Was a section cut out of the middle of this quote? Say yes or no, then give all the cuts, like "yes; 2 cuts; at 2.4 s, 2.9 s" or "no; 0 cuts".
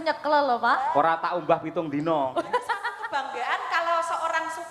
yes; 1 cut; at 3.0 s